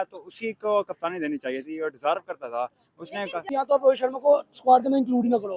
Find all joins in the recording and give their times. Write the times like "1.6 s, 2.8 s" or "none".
3.4 s